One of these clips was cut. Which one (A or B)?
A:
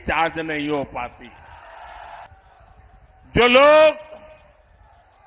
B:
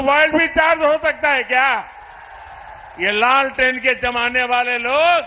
A